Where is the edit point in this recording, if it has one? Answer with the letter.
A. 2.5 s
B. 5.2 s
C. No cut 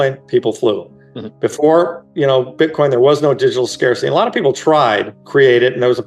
B